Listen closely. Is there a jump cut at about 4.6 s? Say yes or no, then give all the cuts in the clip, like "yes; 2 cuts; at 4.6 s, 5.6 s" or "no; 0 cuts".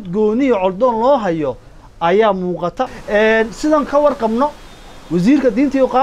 no; 1 cut; at 2.9 s